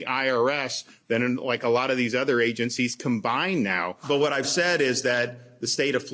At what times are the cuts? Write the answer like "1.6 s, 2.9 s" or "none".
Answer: 3.9 s